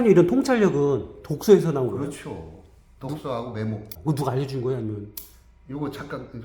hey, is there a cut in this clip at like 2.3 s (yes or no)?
no